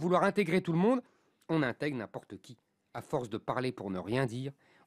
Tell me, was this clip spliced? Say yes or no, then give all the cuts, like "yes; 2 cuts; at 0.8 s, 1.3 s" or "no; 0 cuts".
no; 0 cuts